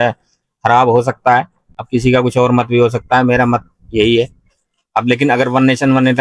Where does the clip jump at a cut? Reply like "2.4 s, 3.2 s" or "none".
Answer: none